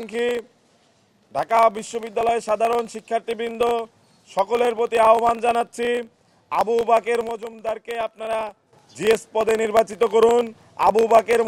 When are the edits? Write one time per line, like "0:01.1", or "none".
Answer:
none